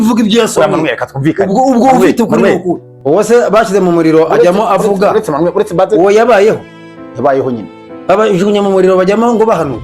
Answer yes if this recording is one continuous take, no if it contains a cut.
no